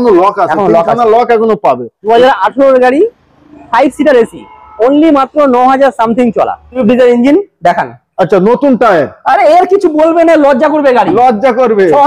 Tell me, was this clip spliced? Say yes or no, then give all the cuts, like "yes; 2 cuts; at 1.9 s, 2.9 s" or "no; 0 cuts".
yes; 2 cuts; at 1.9 s, 6.7 s